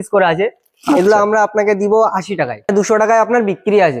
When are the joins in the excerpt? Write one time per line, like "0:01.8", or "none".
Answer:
0:02.7